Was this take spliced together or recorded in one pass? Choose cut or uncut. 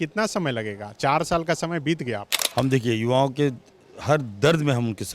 cut